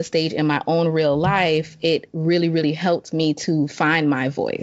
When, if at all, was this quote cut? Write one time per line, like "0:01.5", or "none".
none